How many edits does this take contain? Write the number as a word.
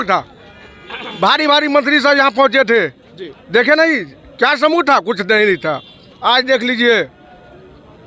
zero